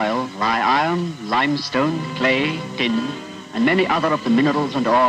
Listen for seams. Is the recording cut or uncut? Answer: cut